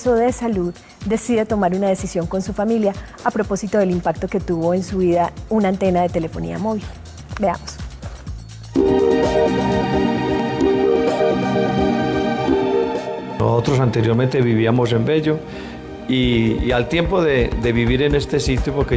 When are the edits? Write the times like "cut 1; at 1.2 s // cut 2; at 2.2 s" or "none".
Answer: none